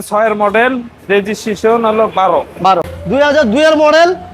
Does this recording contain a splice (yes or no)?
yes